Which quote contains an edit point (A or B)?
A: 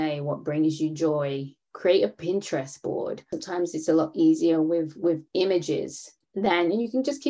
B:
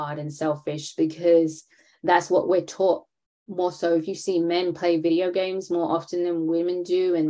A